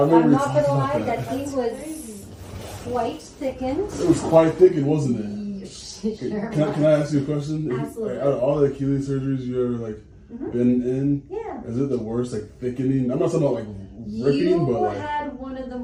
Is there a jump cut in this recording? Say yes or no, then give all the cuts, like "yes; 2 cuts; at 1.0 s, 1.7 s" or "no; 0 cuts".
no; 0 cuts